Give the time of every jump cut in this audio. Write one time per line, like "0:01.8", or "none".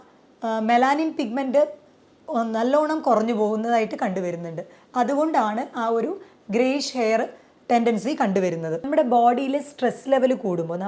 0:08.9